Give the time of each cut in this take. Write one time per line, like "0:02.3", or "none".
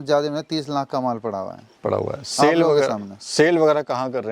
none